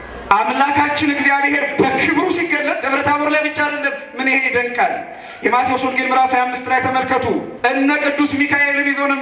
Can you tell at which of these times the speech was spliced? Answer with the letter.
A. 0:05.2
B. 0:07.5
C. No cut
B